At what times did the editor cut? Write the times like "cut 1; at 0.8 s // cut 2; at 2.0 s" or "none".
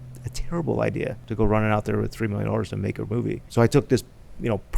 cut 1; at 1.2 s // cut 2; at 3.4 s